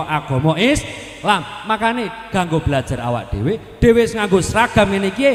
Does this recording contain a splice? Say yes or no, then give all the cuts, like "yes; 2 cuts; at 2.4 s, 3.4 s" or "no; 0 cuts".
no; 0 cuts